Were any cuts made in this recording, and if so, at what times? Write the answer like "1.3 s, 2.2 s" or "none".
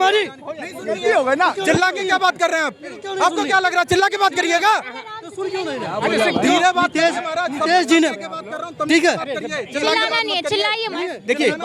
none